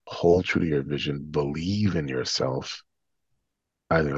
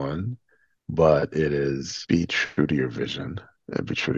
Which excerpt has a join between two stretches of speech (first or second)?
second